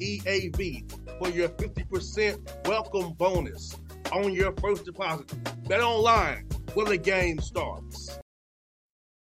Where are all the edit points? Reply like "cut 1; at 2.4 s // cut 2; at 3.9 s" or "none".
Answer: cut 1; at 8.2 s